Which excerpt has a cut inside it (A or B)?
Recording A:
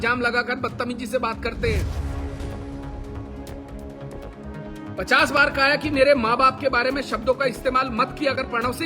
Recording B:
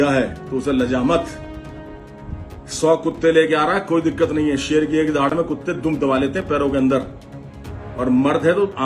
A